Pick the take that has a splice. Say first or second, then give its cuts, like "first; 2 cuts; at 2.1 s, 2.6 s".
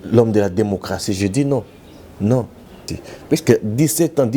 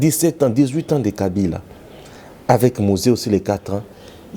first; 1 cut; at 2.8 s